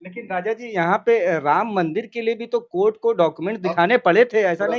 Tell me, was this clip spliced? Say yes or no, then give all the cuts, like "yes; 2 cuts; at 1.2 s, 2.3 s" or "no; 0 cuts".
no; 0 cuts